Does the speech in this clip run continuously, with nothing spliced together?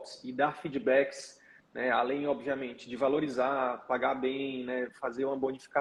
yes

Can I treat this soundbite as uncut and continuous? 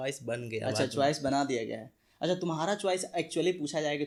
yes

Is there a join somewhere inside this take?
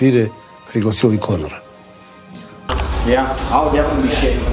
yes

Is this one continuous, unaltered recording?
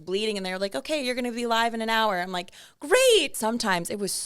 no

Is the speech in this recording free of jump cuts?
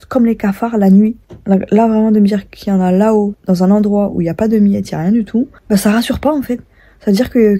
no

